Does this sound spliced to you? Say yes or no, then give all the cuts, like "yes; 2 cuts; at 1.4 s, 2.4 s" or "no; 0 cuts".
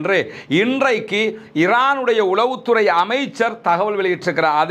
no; 0 cuts